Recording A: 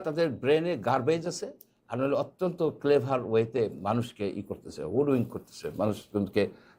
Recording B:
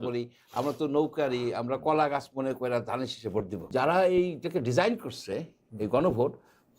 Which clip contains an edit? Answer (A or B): B